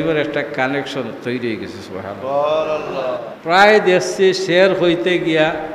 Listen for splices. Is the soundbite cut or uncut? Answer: cut